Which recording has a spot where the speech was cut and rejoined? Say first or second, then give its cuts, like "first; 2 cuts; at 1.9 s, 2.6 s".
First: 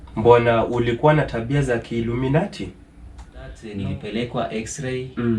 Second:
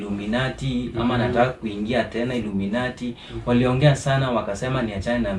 first; 1 cut; at 3.6 s